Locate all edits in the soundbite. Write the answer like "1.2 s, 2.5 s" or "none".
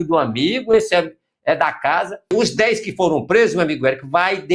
2.3 s